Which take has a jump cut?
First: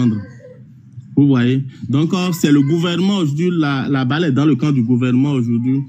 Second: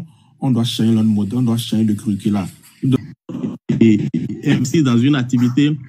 second; 1 cut; at 3.0 s

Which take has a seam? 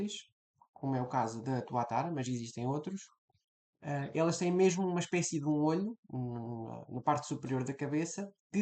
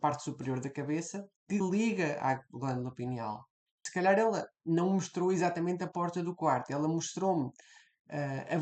second; 1 cut; at 3.8 s

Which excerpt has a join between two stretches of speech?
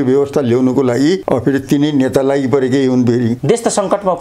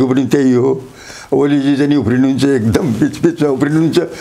first; 2 cuts; at 1.2 s, 3.4 s

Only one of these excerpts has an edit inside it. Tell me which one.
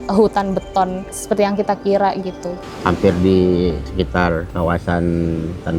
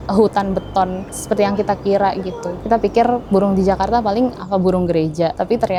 first; 1 cut; at 2.6 s

